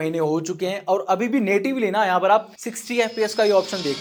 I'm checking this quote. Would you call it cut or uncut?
uncut